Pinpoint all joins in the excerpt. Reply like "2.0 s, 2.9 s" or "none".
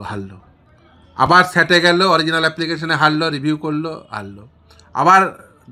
none